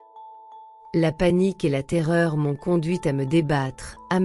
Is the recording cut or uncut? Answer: cut